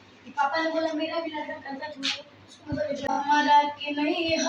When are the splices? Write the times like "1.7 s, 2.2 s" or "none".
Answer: 3.2 s

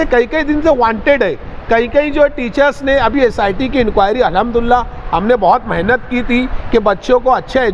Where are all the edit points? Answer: none

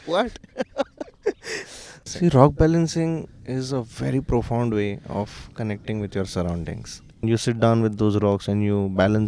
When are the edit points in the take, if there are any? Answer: 2.1 s, 7.2 s

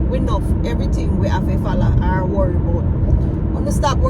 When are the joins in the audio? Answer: none

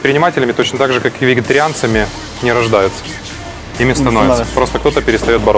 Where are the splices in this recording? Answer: none

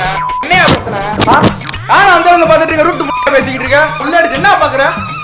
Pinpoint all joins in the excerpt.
1.1 s

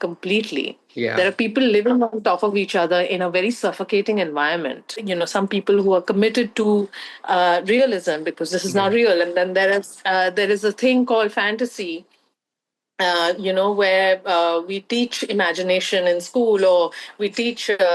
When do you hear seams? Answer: 4.9 s

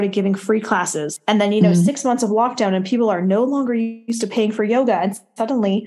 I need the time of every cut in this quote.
1.1 s

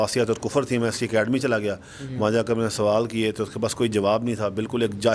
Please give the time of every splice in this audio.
none

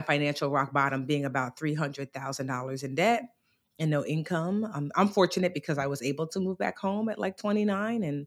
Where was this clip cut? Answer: none

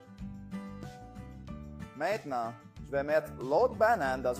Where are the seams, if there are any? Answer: none

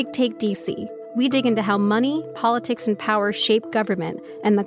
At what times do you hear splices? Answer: 0.9 s

